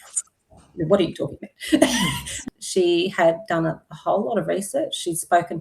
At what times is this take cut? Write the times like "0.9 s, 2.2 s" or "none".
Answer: 2.4 s